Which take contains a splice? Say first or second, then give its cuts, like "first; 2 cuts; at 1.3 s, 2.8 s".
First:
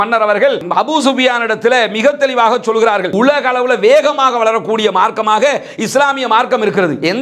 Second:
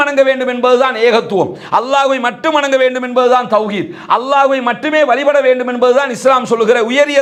first; 1 cut; at 3.1 s